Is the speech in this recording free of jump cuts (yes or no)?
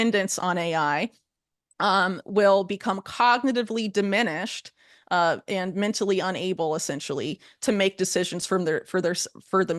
yes